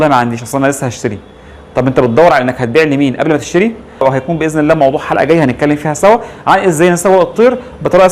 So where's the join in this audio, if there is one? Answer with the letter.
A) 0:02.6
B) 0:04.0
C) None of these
B